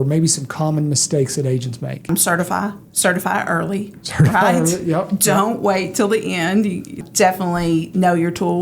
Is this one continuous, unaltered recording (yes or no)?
no